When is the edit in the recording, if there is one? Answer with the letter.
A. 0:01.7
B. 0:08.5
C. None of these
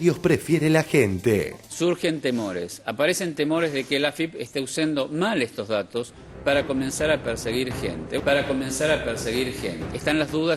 A